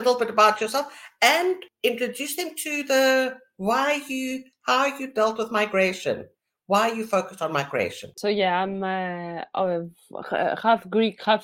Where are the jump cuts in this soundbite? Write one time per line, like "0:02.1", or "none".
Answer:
0:01.7
0:08.2